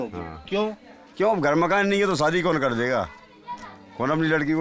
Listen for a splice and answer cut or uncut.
uncut